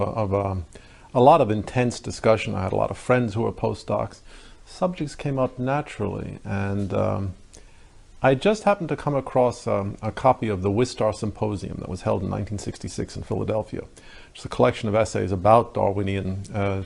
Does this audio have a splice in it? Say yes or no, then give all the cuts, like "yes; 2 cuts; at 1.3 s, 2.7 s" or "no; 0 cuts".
yes; 1 cut; at 3.4 s